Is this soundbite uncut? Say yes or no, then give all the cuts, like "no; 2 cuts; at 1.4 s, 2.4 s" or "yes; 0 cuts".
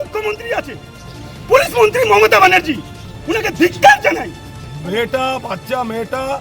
no; 1 cut; at 4.6 s